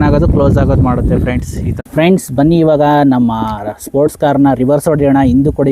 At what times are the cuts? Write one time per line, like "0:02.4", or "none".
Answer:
0:01.6